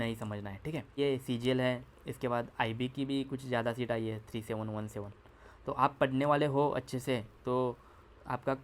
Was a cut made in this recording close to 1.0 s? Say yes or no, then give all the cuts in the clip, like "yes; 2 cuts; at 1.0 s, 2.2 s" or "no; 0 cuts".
yes; 1 cut; at 1.0 s